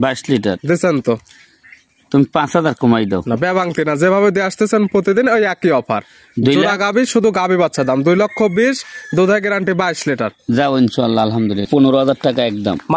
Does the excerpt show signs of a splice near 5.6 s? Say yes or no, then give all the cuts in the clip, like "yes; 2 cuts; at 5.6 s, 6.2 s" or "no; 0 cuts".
no; 1 cut; at 11.7 s